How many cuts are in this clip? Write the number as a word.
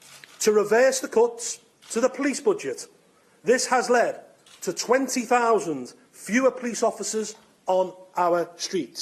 zero